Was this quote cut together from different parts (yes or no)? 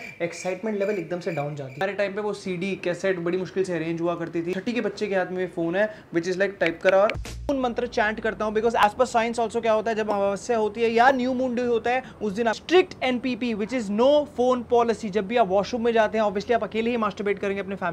yes